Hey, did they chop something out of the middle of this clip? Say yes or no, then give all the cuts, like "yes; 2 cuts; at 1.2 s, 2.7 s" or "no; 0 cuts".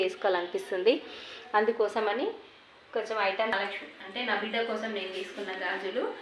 yes; 1 cut; at 3.5 s